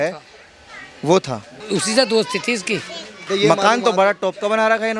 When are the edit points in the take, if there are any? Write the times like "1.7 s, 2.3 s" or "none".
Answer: 1.5 s, 3.1 s